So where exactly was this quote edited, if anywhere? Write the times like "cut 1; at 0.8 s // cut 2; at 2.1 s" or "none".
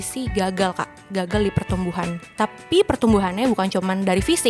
none